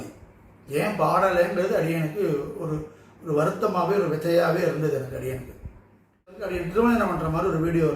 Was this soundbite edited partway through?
yes; 1 cut; at 6.5 s

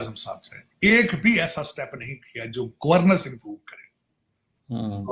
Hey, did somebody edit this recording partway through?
no; 0 cuts

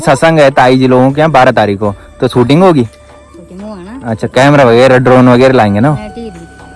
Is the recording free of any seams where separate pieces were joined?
yes; 0 cuts

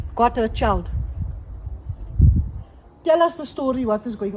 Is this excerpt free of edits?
yes; 0 cuts

